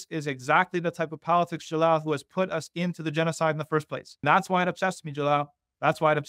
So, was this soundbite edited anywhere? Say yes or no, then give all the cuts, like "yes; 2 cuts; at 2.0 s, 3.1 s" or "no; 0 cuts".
yes; 1 cut; at 4.2 s